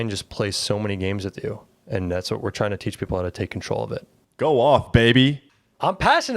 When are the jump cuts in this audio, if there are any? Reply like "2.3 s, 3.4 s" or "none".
4.2 s, 5.4 s